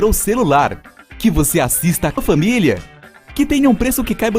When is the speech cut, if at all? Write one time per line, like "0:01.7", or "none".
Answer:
0:02.2